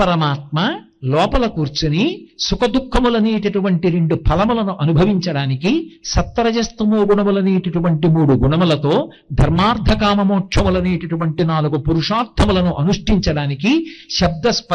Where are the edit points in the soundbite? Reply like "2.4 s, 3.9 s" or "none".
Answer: none